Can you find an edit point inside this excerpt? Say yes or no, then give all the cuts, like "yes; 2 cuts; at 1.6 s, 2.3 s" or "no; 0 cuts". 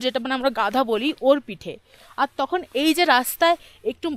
no; 0 cuts